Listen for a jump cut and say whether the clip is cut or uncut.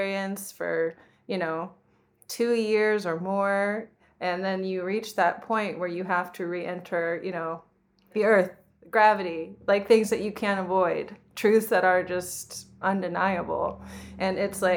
cut